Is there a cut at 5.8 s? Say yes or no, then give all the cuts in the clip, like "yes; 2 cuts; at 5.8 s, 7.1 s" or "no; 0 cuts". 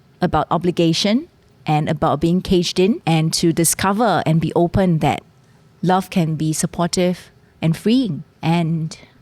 no; 2 cuts; at 3.0 s, 8.3 s